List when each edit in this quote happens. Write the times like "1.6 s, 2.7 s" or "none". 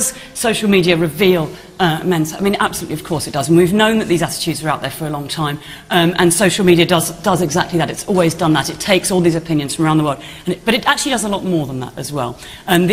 10.4 s